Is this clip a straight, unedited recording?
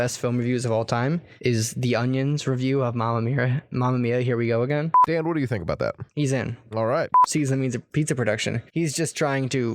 no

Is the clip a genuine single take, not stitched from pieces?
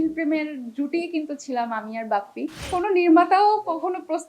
no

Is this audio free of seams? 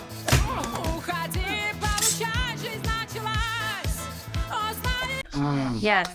yes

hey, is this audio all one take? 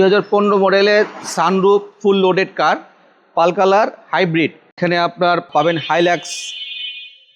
no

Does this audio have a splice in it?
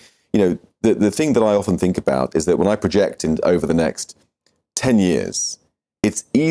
no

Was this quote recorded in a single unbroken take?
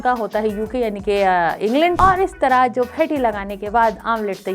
no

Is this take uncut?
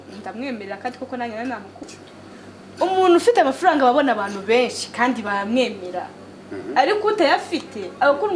no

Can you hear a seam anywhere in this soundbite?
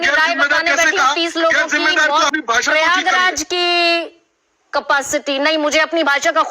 yes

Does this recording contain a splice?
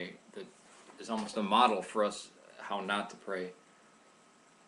no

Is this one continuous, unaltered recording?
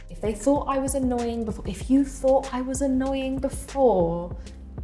yes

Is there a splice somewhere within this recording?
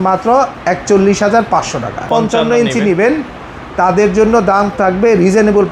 yes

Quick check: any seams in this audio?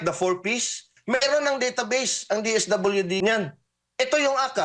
yes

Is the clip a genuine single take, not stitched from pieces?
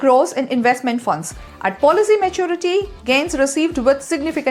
yes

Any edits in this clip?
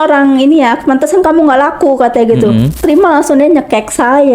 yes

